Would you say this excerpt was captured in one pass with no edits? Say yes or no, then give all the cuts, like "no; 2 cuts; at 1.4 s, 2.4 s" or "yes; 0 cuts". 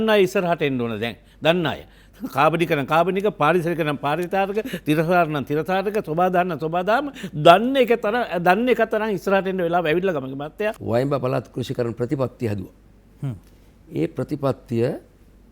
no; 1 cut; at 10.8 s